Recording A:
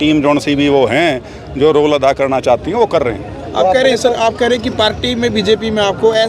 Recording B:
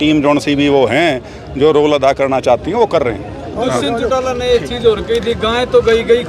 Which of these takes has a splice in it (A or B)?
B